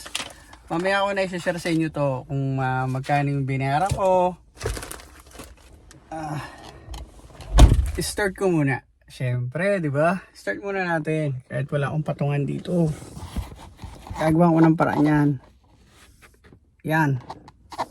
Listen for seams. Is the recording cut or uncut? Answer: uncut